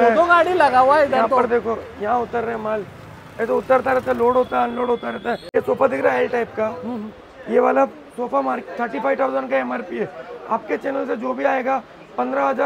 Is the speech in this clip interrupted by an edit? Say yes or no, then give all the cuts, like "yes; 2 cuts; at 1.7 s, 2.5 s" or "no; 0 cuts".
yes; 1 cut; at 5.2 s